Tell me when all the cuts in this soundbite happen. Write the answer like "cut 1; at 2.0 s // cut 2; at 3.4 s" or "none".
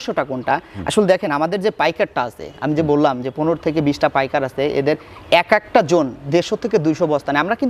none